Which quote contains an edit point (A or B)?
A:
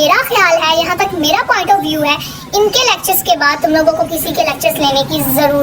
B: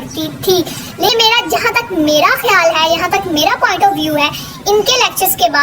B